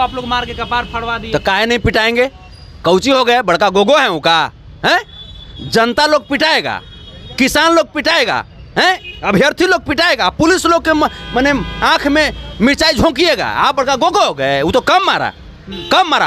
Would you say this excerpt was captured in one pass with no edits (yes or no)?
yes